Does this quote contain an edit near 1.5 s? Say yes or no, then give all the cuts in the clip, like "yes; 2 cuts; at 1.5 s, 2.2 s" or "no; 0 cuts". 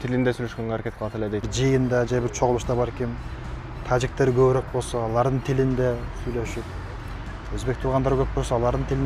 yes; 1 cut; at 1.5 s